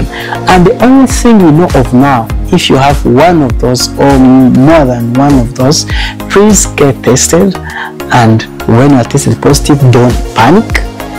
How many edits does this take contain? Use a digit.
1